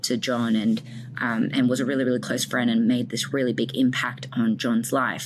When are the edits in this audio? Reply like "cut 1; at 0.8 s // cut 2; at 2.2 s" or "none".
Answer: none